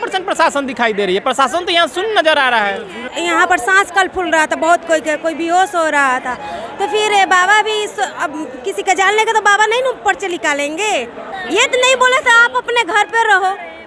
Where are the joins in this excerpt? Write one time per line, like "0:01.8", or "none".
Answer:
0:03.1
0:11.3